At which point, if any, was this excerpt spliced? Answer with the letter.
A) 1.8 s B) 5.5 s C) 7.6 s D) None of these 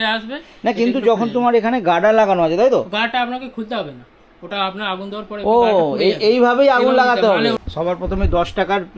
C